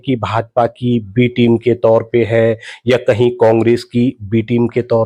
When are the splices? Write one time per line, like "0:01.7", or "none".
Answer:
none

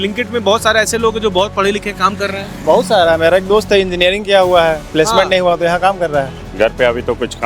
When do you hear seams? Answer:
0:06.4

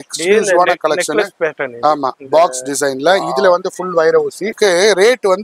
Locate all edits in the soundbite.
0:04.6

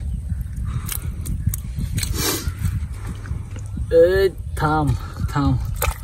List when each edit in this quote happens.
none

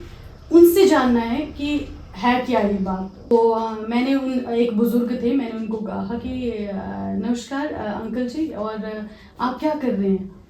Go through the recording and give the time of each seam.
0:03.3

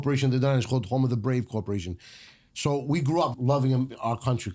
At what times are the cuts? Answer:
0:03.3

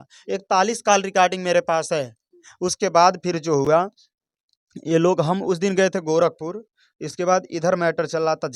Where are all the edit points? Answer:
none

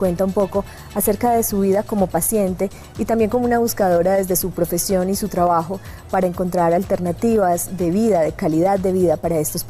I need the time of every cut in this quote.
0:05.5

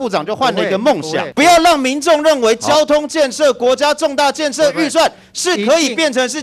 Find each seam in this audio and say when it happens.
0:01.3

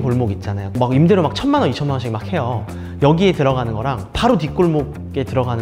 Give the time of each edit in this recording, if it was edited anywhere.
none

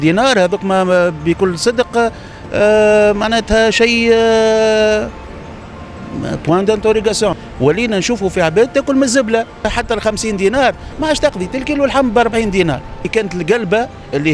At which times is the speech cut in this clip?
0:07.4
0:09.7
0:13.1

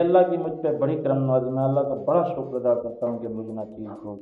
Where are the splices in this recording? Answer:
none

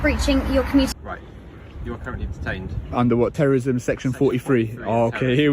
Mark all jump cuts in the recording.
0:01.0

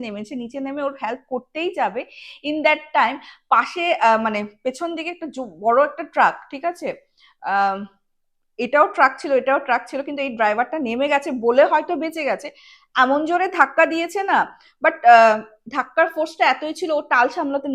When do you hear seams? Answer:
none

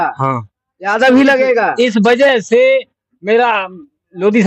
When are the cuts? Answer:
none

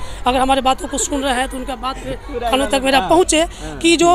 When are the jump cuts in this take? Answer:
none

